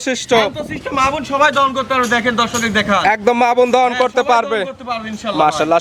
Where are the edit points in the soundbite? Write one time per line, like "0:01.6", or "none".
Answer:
none